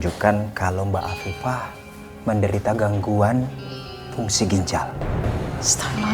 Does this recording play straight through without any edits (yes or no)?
yes